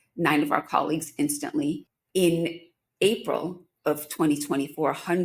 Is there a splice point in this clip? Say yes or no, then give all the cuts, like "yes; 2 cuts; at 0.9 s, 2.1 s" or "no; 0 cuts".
yes; 1 cut; at 1.9 s